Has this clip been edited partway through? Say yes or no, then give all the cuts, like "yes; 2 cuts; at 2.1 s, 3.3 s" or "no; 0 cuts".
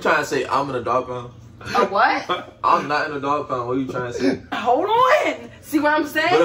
yes; 1 cut; at 4.5 s